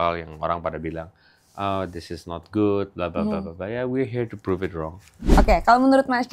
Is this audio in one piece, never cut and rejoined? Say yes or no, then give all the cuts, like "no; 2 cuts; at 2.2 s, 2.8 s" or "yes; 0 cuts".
no; 1 cut; at 5.1 s